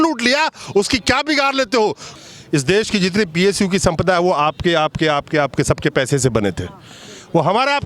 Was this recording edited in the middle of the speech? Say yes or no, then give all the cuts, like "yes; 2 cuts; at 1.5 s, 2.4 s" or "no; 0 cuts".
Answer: yes; 1 cut; at 2.1 s